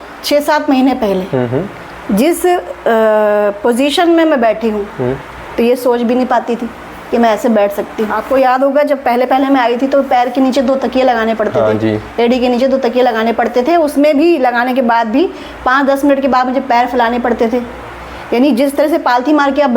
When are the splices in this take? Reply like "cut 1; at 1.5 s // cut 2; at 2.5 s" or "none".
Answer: cut 1; at 8.2 s